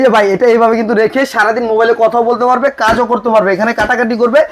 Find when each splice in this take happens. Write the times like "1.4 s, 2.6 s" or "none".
none